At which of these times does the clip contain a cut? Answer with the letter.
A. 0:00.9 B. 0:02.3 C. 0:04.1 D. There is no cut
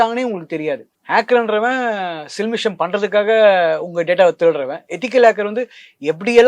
A